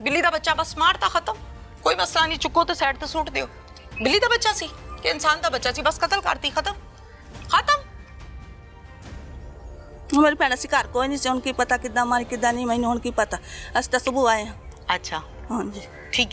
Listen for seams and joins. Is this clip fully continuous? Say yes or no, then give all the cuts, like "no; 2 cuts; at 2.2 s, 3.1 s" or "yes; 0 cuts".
yes; 0 cuts